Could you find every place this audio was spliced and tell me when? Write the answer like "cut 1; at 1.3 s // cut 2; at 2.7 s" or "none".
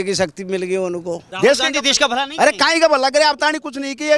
cut 1; at 1.2 s